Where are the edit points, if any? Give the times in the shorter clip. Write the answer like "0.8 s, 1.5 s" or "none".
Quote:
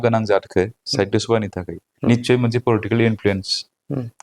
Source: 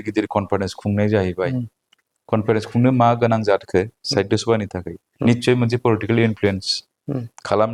none

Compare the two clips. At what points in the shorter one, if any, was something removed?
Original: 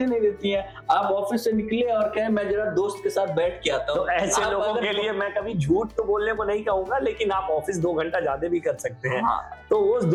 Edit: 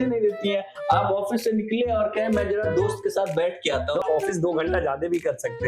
4.0 s

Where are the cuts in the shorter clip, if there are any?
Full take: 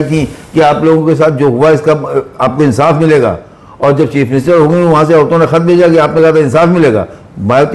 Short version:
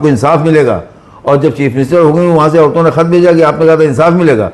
none

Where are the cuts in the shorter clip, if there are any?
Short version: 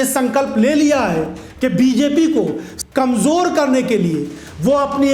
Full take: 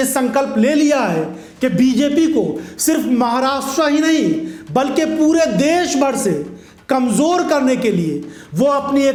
2.7 s

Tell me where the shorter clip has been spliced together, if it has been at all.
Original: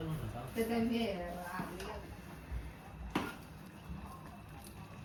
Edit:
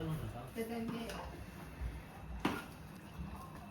1.3 s

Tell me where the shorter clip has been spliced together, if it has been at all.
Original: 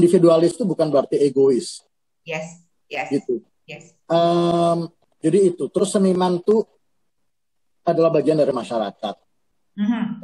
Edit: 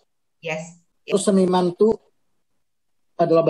1.1 s

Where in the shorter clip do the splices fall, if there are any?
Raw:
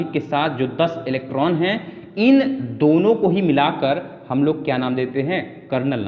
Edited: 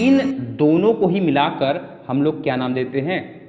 none

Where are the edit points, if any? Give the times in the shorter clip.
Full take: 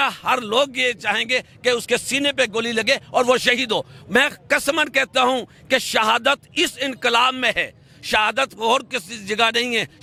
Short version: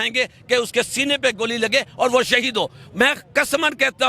none

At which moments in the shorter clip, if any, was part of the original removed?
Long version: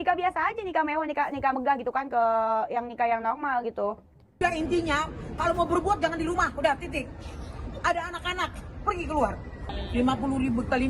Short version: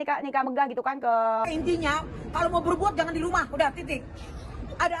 1.5 s

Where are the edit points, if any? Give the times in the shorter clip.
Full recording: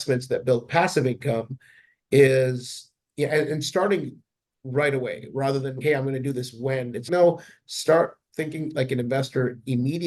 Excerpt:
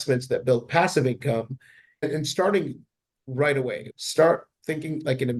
2.1 s, 3.8 s

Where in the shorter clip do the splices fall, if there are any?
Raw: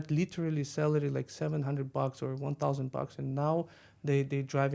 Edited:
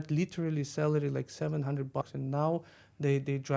2.0 s

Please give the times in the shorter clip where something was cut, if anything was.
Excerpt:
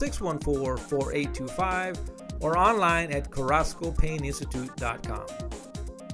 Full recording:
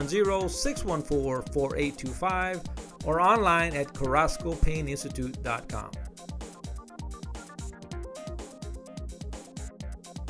5.0 s

